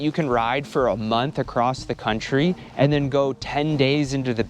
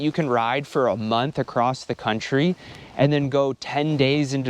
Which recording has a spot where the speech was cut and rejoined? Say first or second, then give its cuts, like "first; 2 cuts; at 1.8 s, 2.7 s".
first; 1 cut; at 2.6 s